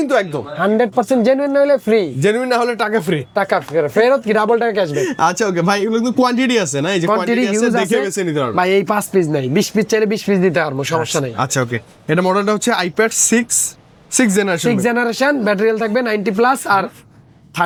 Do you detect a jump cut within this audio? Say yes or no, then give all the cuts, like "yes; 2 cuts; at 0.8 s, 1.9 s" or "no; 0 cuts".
no; 0 cuts